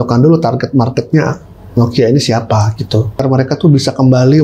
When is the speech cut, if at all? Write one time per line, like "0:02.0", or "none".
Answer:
0:03.2